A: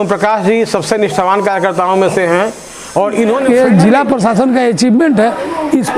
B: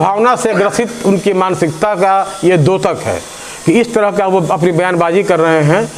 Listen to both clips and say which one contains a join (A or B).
A